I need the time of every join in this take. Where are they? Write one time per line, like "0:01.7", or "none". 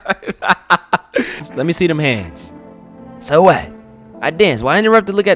0:01.4

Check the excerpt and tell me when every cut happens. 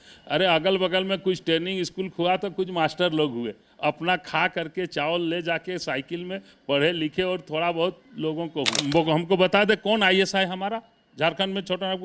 0:08.8

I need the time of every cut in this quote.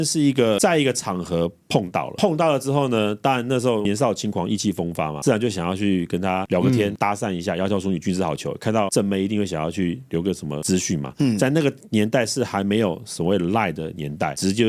none

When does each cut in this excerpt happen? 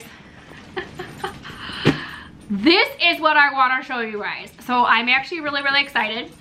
none

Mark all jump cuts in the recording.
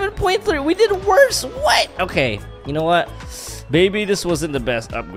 none

